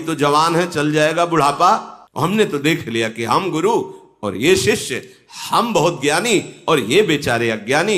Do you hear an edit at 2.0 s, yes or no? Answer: yes